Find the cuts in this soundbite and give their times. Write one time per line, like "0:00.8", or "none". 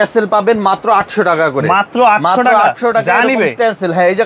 none